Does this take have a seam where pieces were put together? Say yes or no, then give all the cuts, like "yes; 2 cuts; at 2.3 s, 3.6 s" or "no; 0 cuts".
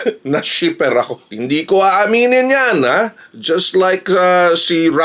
yes; 1 cut; at 1.3 s